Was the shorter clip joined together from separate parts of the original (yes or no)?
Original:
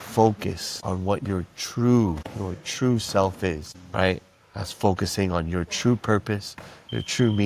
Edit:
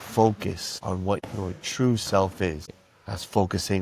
yes